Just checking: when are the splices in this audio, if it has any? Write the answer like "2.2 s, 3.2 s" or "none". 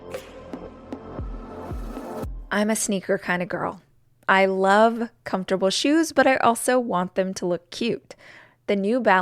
2.4 s